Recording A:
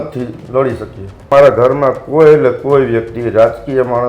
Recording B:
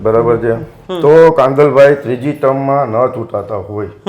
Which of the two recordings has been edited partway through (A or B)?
A